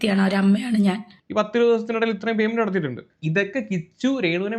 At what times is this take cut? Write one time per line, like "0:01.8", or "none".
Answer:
0:01.1